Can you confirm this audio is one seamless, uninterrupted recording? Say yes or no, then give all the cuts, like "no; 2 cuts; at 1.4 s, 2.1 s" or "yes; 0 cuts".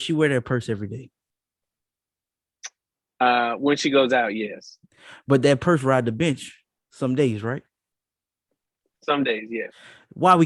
yes; 0 cuts